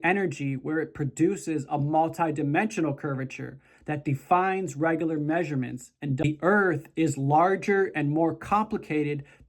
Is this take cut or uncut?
cut